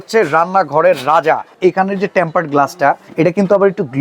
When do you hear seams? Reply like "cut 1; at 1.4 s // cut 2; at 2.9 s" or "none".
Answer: cut 1; at 1.5 s // cut 2; at 3.0 s